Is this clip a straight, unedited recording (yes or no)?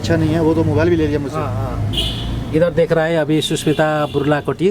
yes